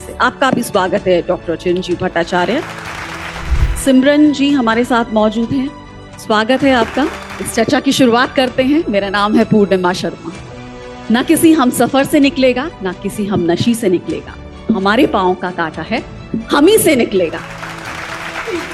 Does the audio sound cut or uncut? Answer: cut